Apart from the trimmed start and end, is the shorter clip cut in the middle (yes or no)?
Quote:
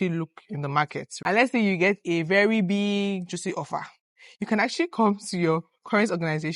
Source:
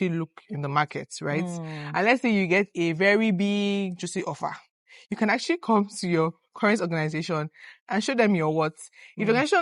yes